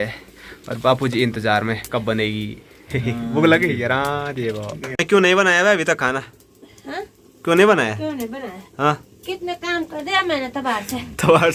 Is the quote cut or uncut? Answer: uncut